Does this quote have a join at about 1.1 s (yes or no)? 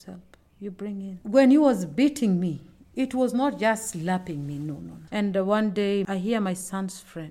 yes